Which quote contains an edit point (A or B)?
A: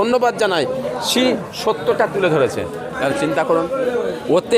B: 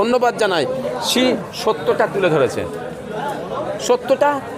A